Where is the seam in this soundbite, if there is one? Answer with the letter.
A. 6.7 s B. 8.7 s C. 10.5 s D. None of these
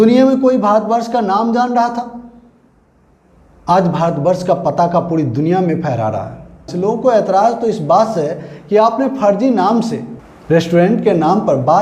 A